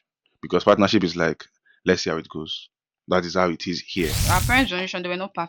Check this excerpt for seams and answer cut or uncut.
cut